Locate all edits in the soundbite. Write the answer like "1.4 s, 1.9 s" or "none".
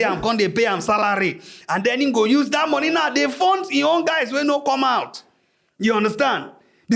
none